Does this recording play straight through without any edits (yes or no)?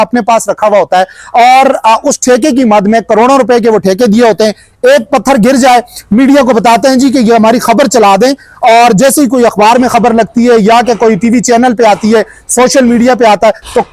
yes